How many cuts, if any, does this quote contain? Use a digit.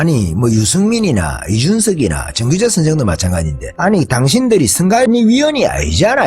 2